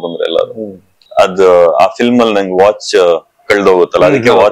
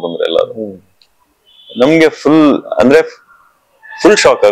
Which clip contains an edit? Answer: first; 1 cut; at 1.0 s

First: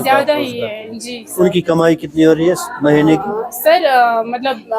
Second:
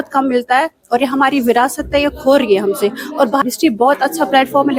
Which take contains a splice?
second; 1 cut; at 3.4 s

